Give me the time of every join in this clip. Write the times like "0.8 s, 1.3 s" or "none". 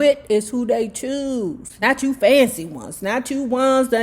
1.7 s

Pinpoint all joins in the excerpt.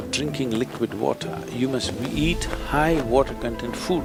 none

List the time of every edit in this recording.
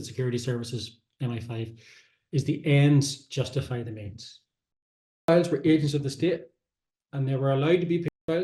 5.2 s

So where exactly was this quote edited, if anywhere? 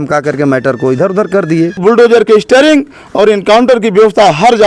1.8 s

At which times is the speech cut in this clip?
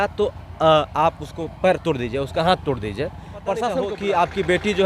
3.8 s

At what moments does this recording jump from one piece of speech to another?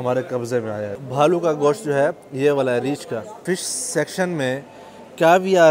1.0 s, 3.4 s

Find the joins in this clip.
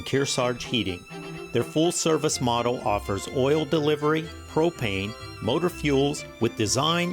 none

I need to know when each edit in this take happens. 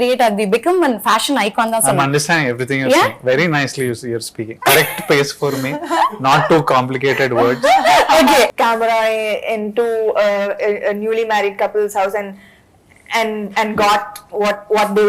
8.5 s

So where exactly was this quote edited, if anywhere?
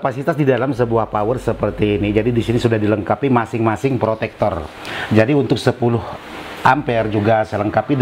none

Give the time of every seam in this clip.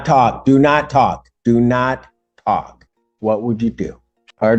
none

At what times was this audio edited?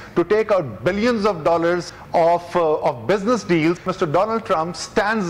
1.9 s, 3.9 s

